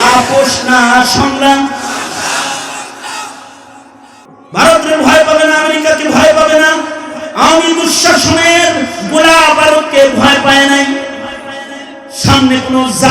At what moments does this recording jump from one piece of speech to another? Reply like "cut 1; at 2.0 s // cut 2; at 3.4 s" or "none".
cut 1; at 4.2 s